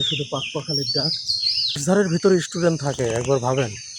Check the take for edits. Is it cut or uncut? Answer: cut